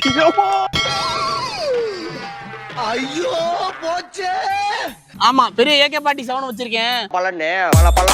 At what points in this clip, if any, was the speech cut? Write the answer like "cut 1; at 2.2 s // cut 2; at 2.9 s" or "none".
cut 1; at 5.0 s